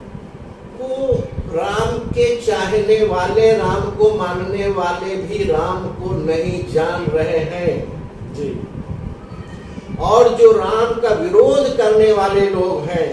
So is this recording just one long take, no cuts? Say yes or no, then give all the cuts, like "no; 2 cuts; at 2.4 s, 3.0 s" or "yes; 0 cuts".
yes; 0 cuts